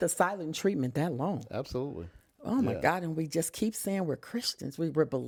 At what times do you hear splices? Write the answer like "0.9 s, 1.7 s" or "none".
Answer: none